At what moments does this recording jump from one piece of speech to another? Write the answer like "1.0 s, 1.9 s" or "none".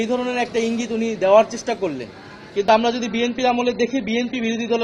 none